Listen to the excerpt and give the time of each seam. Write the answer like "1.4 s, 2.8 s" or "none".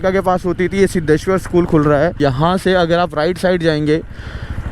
2.2 s